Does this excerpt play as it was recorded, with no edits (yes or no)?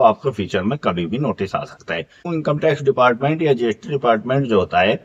no